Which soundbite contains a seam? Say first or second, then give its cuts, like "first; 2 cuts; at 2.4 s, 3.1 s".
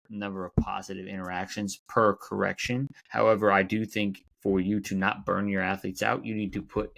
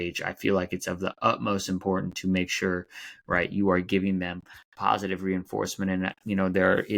first; 2 cuts; at 3.0 s, 4.3 s